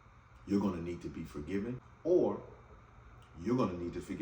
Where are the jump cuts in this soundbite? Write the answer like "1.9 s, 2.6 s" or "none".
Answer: 1.9 s